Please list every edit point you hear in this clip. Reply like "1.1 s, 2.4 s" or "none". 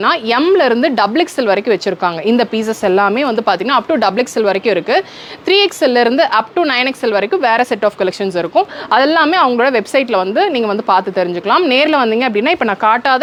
none